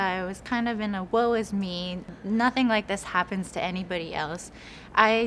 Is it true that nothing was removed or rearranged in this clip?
no; 1 cut; at 2.1 s

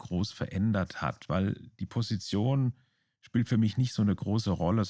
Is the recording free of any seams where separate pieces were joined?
yes; 0 cuts

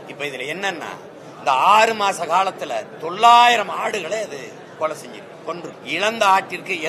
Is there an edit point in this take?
yes; 1 cut; at 5.8 s

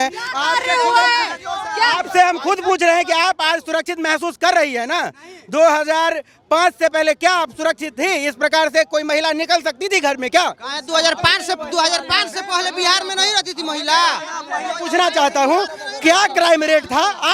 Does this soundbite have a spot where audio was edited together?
no; 0 cuts

